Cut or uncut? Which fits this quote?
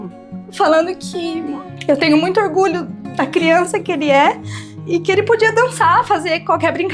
cut